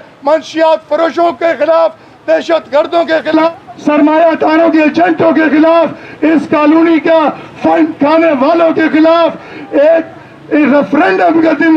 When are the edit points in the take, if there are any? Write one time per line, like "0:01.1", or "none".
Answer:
0:03.5

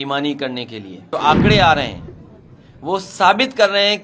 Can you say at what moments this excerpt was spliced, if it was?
0:01.1

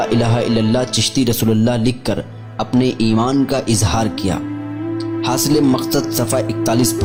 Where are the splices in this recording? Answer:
none

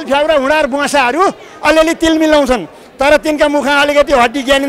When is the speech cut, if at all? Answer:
none

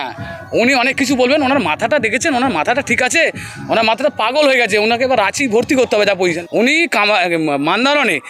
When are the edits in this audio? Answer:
0:06.4

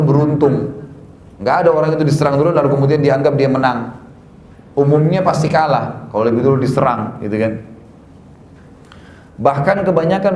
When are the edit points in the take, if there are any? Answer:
none

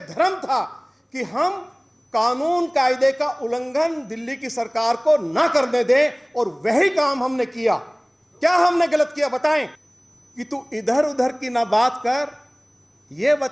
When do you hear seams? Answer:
0:09.7

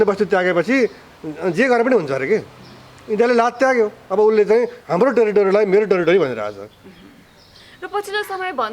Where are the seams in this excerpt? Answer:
none

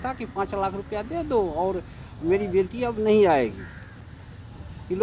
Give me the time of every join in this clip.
none

